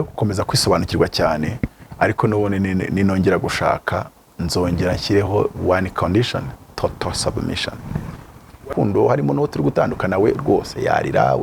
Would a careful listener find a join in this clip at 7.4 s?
no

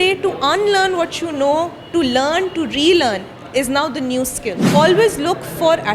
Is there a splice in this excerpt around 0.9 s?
no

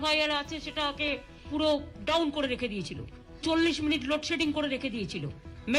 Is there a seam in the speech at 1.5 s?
yes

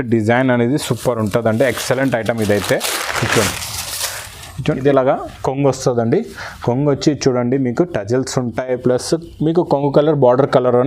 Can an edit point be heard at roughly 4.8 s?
yes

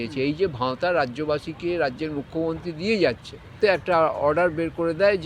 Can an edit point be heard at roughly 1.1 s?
no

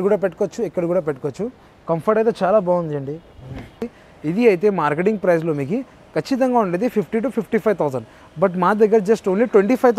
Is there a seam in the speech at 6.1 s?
no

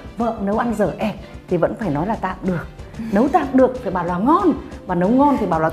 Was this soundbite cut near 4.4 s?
no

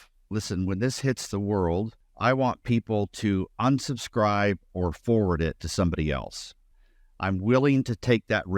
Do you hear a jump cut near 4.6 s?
no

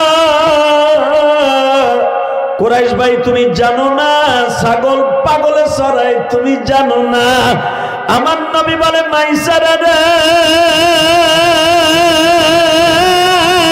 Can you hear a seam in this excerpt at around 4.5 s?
no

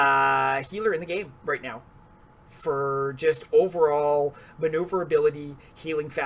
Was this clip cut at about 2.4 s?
no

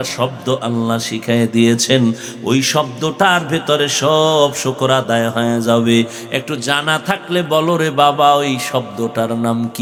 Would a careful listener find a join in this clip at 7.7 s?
no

